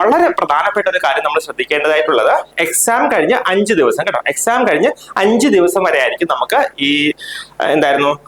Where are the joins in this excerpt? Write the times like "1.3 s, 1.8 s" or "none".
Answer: none